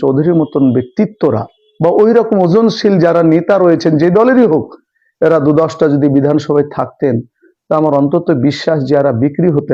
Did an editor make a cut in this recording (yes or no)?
no